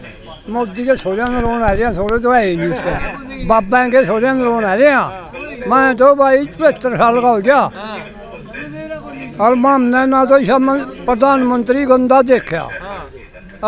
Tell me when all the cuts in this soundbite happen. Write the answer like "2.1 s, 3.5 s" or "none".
none

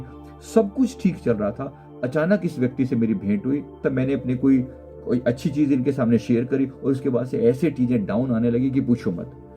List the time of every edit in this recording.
3.8 s, 4.8 s

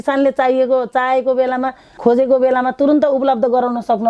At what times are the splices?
2.0 s

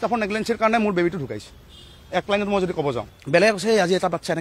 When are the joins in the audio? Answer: 3.1 s

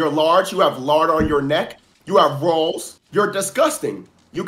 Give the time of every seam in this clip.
2.9 s

